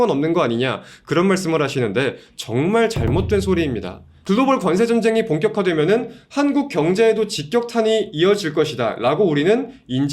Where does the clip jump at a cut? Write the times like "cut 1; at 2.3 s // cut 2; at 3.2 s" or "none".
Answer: cut 1; at 4.0 s

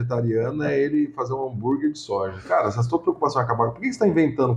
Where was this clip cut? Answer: none

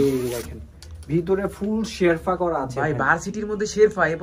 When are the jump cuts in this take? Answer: none

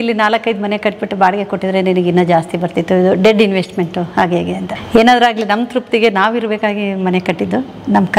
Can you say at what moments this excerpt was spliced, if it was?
cut 1; at 4.7 s

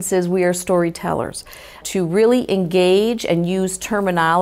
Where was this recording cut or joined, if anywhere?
none

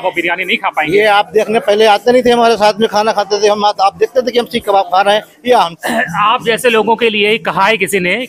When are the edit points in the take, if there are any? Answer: cut 1; at 5.8 s

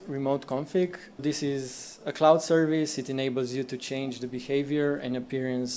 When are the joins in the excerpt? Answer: cut 1; at 1.2 s

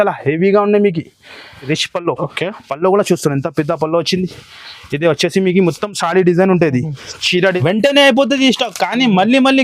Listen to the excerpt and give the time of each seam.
cut 1; at 1.7 s // cut 2; at 7.5 s

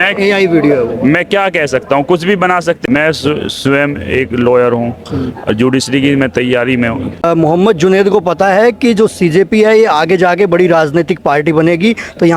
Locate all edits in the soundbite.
cut 1; at 2.8 s // cut 2; at 7.2 s

